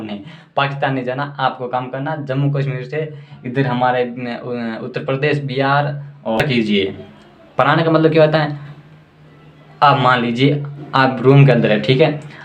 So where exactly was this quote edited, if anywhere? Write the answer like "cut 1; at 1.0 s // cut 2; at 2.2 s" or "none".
cut 1; at 6.4 s